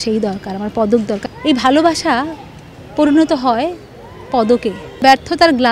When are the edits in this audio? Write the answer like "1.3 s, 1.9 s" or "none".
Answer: 1.2 s, 5.0 s